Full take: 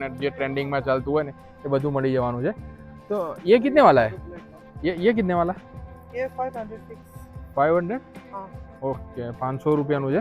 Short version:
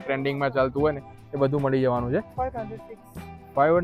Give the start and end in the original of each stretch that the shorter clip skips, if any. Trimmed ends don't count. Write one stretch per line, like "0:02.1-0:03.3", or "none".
0:02.6-0:06.3

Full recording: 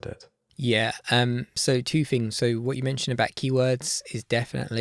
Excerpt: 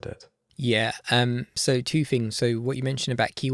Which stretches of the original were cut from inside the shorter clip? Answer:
none

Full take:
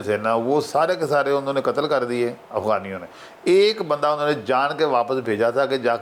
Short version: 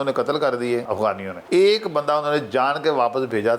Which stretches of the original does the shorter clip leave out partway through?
0:02.5-0:02.9

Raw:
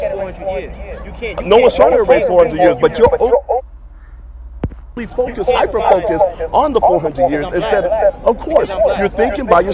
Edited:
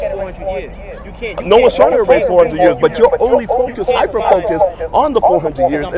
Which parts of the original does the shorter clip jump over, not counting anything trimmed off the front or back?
0:03.6-0:05.2

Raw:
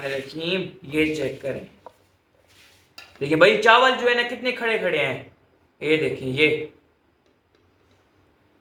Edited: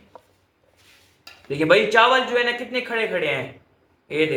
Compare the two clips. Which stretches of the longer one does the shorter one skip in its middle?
none

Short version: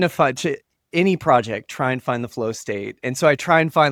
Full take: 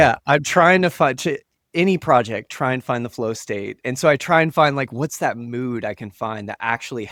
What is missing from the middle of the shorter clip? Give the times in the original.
none

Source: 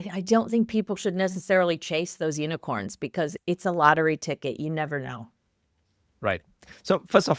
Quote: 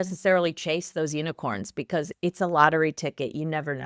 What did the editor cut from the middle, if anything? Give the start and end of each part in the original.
none

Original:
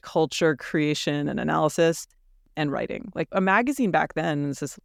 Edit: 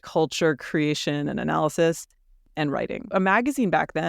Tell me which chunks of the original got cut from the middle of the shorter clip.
0:03.1-0:03.3

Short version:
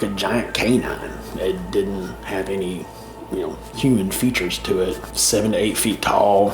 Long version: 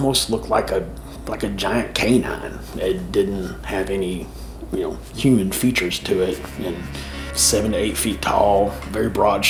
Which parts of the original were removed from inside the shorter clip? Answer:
0:06.5-0:07.3

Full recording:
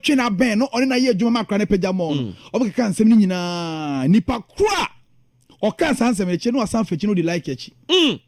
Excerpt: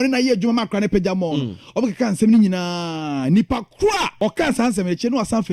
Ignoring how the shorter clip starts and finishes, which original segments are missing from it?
0:04.9-0:05.5

